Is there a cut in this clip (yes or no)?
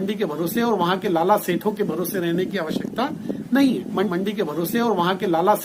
yes